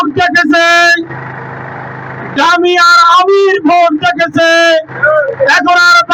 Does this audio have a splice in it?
no; 0 cuts

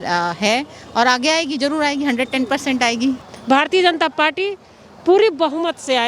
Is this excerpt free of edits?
no; 1 cut; at 3.3 s

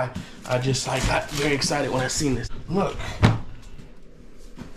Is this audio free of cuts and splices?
no; 1 cut; at 2.5 s

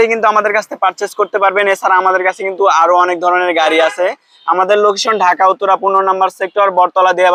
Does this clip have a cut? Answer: no; 0 cuts

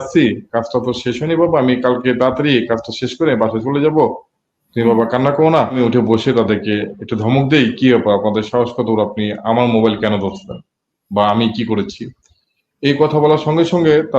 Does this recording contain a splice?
yes; 1 cut; at 5.7 s

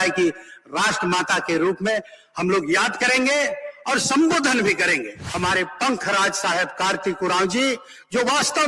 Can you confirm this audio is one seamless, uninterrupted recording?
no; 1 cut; at 5.2 s

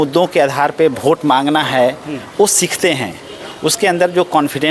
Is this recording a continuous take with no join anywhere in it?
yes; 0 cuts

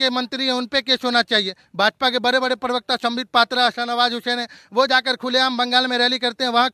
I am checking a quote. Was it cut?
no; 0 cuts

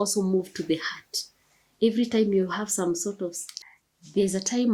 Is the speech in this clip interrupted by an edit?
yes; 1 cut; at 3.5 s

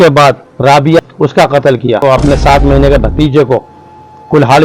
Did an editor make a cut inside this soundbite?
yes; 2 cuts; at 1.0 s, 2.0 s

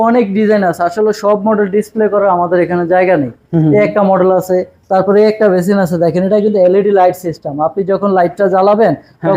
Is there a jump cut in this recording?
no; 0 cuts

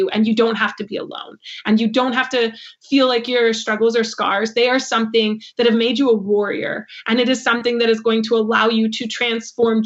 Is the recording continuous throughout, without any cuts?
yes; 0 cuts

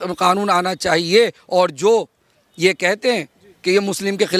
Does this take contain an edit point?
no; 0 cuts

